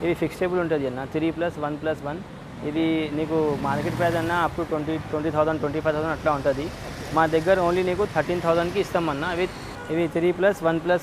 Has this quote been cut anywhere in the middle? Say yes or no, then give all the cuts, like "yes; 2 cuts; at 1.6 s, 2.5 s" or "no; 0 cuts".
yes; 1 cut; at 9.7 s